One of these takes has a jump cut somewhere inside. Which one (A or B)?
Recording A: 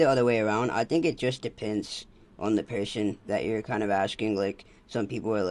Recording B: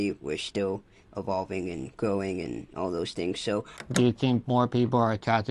B